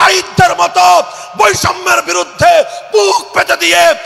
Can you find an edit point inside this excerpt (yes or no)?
no